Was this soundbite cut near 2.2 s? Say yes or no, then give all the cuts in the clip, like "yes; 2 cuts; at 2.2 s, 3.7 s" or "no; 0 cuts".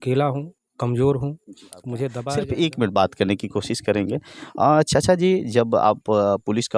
yes; 1 cut; at 2.2 s